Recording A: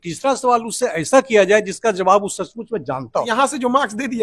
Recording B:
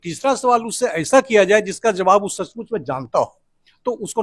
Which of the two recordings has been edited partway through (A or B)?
A